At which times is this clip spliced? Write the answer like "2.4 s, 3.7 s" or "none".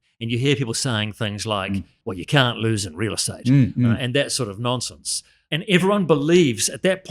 1.9 s, 5.4 s